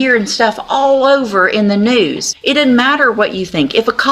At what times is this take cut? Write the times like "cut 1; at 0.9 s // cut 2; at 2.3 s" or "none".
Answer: cut 1; at 2.3 s